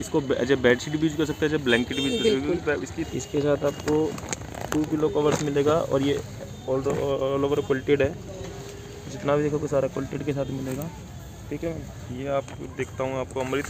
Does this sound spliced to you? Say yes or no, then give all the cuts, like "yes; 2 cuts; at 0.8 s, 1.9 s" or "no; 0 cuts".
yes; 2 cuts; at 3.1 s, 12.0 s